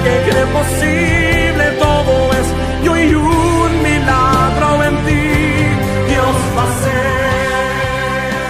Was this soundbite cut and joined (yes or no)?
no